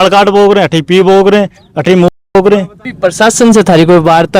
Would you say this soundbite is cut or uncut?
cut